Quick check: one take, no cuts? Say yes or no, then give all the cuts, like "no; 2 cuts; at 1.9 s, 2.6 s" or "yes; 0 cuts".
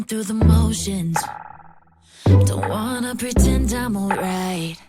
yes; 0 cuts